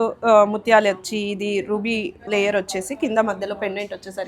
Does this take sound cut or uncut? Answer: cut